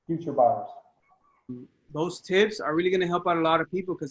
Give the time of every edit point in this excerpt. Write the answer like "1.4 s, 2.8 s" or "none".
1.7 s